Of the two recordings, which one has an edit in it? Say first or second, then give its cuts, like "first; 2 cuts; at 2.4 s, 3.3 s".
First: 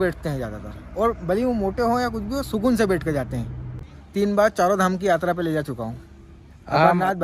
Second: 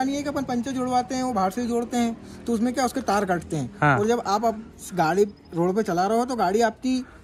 first; 1 cut; at 3.8 s